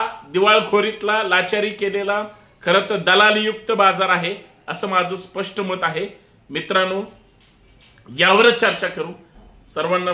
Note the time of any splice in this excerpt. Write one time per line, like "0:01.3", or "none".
none